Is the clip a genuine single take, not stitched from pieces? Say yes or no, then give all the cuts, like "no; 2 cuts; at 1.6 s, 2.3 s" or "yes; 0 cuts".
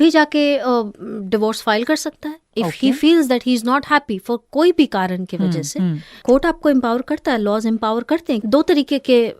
no; 2 cuts; at 6.2 s, 8.4 s